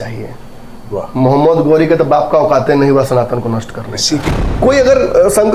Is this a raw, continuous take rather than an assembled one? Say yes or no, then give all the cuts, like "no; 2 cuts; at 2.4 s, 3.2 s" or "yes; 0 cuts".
no; 1 cut; at 4.2 s